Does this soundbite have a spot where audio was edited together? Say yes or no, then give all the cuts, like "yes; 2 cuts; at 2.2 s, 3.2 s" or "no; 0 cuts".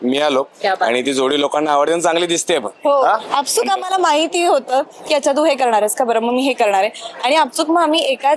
yes; 1 cut; at 3.2 s